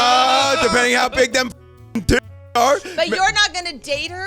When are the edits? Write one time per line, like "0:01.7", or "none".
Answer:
0:01.6